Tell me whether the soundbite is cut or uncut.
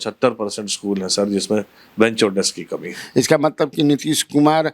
cut